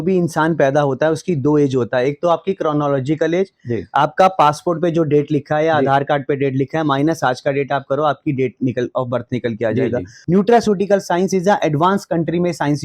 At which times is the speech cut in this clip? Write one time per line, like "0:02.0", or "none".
0:10.1